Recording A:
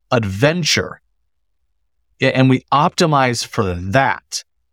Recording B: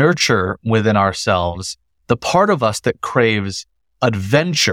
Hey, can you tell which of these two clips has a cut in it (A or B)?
A